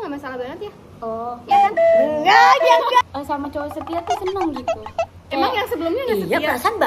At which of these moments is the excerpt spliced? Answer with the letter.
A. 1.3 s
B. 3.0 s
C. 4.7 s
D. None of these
B